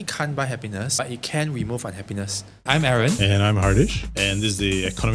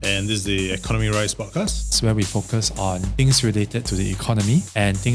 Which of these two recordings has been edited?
first; 2 cuts; at 1.0 s, 2.6 s

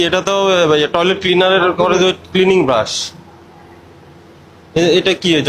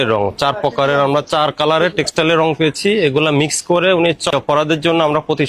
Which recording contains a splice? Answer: second; 1 cut; at 4.3 s

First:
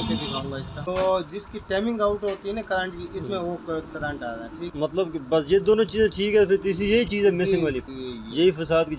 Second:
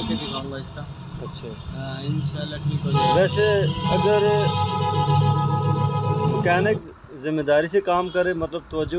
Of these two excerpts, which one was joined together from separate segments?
first; 3 cuts; at 0.9 s, 4.7 s, 7.8 s

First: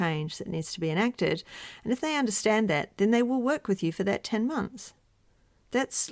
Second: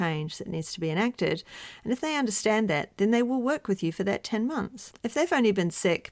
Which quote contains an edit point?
second; 1 cut; at 4.8 s

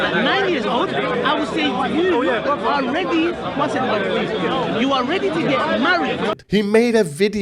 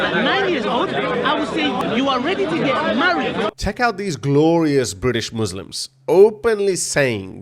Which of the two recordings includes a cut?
second; 2 cuts; at 1.8 s, 3.6 s

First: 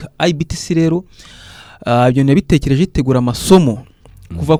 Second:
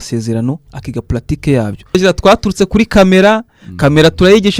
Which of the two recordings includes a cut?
second; 1 cut; at 2.0 s

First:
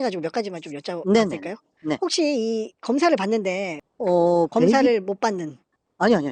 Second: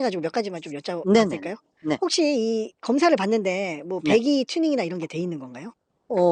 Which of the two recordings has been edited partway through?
first; 1 cut; at 3.8 s

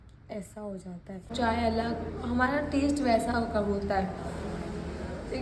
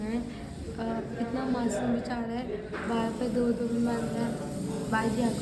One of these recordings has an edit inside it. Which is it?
first; 1 cut; at 1.3 s

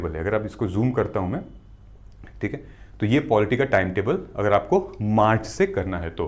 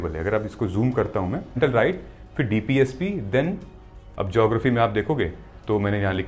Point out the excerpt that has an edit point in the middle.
second; 2 cuts; at 1.6 s, 4.0 s

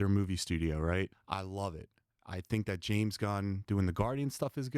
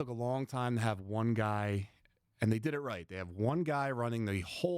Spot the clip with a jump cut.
first; 1 cut; at 1.2 s

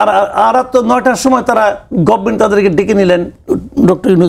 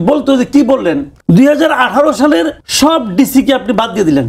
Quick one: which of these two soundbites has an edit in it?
second; 2 cuts; at 1.1 s, 2.6 s

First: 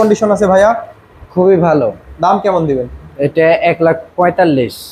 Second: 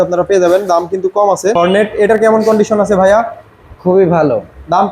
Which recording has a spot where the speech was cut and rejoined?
second; 1 cut; at 1.6 s

